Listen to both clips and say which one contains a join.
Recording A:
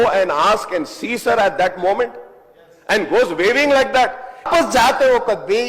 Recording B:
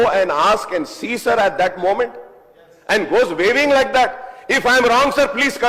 A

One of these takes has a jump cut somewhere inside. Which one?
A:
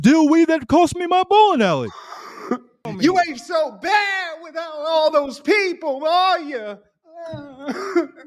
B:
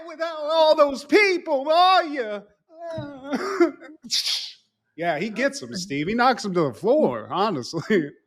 A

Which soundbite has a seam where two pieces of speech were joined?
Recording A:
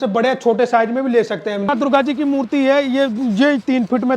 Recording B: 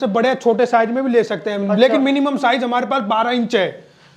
A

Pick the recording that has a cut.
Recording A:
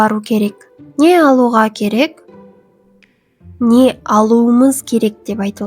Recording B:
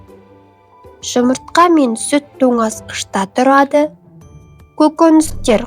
B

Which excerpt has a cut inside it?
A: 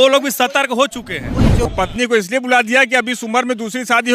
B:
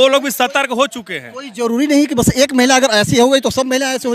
A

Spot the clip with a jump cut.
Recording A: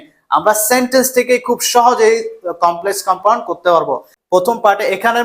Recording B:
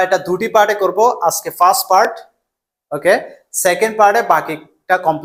A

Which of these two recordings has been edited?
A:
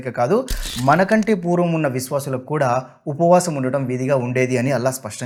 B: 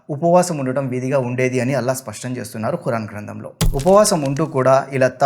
B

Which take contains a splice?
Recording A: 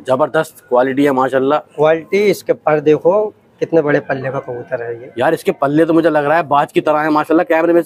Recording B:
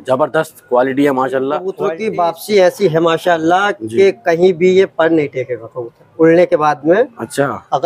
B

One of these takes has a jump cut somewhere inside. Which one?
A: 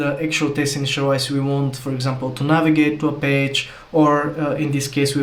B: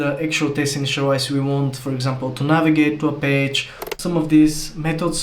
B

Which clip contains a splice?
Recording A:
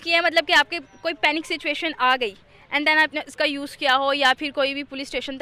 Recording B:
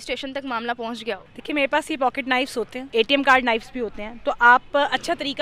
B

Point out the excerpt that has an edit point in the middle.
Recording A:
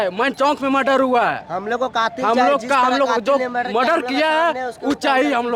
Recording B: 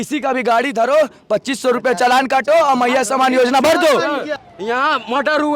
B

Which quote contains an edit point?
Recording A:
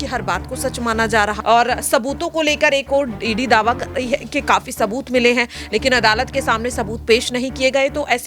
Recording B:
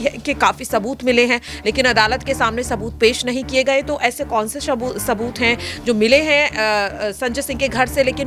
A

